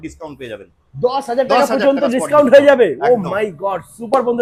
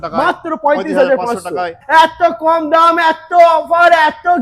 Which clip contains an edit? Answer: second; 1 cut; at 1.8 s

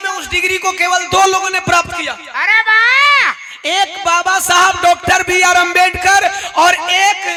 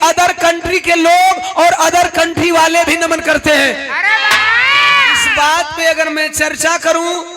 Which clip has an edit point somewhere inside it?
second; 1 cut; at 5.2 s

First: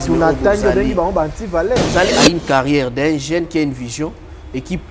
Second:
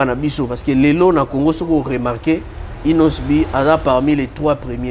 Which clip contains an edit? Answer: first; 1 cut; at 2.1 s

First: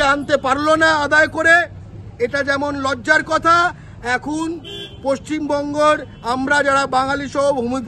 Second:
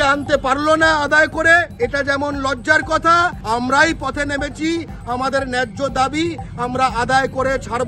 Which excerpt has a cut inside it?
second; 2 cuts; at 1.7 s, 3.4 s

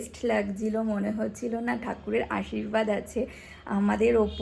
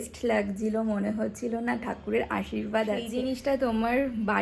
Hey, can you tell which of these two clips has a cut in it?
second; 1 cut; at 3.1 s

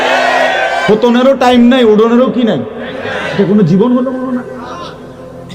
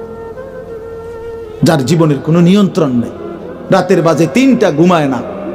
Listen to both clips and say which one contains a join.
second; 1 cut; at 1.6 s

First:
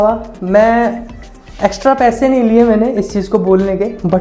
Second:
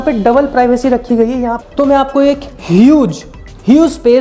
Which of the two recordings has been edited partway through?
second; 1 cut; at 1.5 s

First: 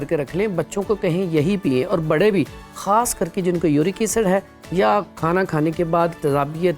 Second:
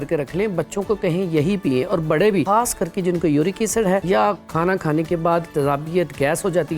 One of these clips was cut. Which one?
second; 2 cuts; at 2.5 s, 4.0 s

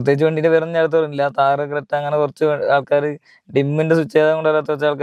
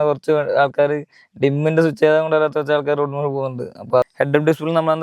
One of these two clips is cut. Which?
second; 1 cut; at 4.1 s

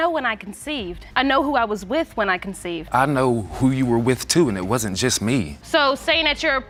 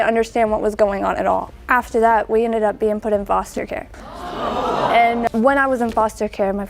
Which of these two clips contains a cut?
second; 1 cut; at 5.3 s

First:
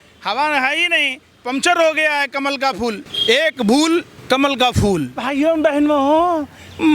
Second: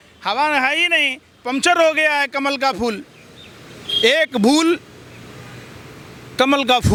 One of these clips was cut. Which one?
first; 3 cuts; at 3.1 s, 4.1 s, 5.2 s

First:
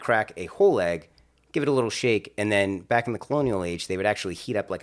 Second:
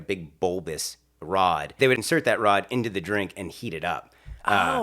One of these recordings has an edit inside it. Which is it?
second; 1 cut; at 2.0 s

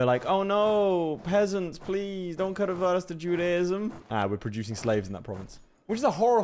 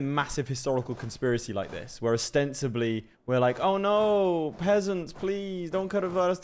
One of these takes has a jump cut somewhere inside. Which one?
first; 1 cut; at 4.0 s

